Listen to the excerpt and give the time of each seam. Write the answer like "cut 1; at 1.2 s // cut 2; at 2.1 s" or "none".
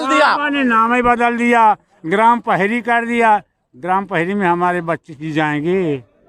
none